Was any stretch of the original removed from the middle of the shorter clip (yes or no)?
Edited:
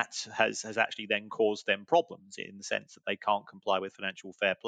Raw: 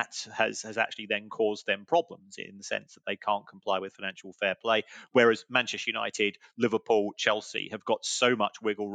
no